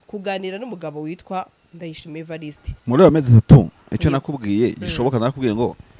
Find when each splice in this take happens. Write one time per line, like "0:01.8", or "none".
0:02.7